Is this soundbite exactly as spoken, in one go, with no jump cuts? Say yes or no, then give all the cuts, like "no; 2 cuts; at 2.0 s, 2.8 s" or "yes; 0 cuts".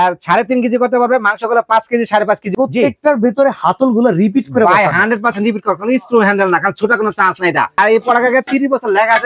no; 2 cuts; at 2.5 s, 7.8 s